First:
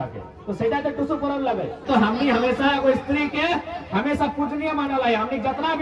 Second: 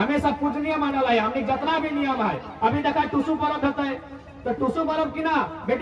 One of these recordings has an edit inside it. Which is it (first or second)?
first